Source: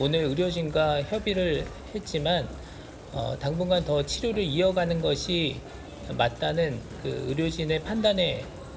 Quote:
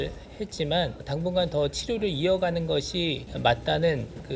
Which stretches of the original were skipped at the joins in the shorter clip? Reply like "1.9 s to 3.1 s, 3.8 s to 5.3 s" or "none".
2.6 s to 3.4 s, 5.6 s to 6.0 s

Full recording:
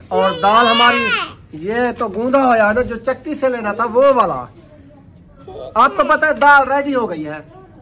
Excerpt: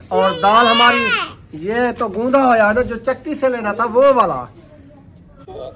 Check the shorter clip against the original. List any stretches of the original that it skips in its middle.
none

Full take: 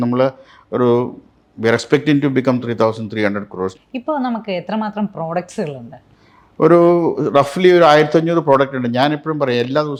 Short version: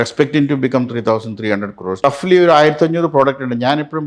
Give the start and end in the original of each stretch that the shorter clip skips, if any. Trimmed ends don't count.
3.8 s to 7.4 s

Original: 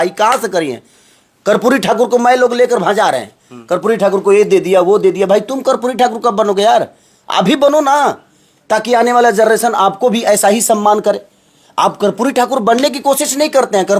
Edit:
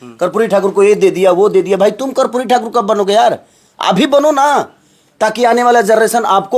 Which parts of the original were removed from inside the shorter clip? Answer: none

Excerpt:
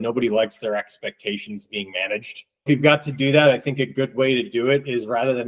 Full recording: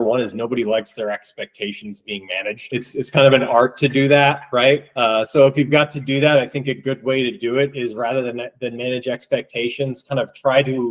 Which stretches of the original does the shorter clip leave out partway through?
3.0 s to 5.5 s

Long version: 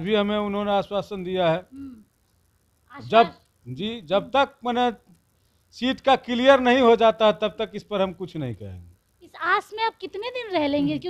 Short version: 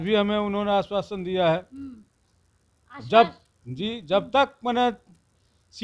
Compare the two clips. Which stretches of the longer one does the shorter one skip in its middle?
none

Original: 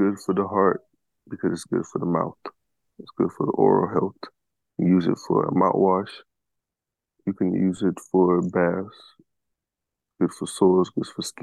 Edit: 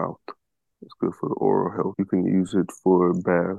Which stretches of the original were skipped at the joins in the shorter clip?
4.1 s to 7.2 s

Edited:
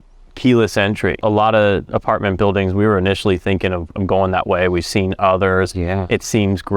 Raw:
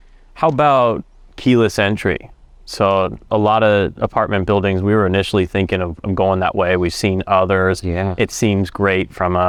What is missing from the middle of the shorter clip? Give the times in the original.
2.2 s to 3.2 s

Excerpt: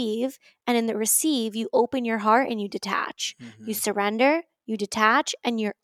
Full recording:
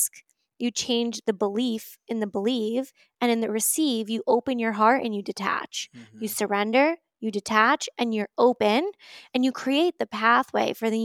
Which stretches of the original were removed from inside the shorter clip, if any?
none

